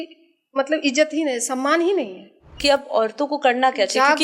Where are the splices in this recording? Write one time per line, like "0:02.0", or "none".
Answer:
0:02.5